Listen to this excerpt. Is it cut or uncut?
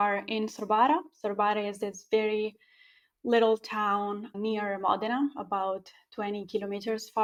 uncut